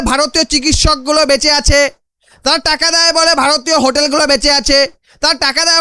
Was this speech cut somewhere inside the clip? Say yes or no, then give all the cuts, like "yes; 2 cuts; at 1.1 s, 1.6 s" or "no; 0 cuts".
no; 0 cuts